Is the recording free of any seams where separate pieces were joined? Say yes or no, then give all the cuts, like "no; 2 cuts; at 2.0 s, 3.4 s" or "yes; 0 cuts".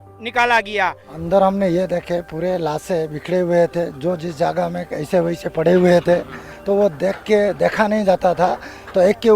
no; 1 cut; at 1.1 s